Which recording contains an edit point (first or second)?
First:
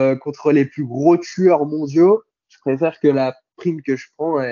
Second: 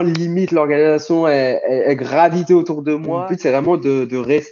second